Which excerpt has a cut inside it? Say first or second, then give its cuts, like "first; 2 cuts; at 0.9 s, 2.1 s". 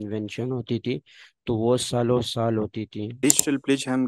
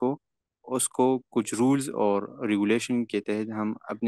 first; 1 cut; at 3.0 s